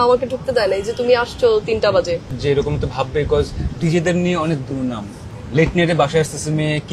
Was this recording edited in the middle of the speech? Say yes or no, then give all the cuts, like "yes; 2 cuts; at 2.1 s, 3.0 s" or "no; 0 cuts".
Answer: yes; 2 cuts; at 2.4 s, 5.3 s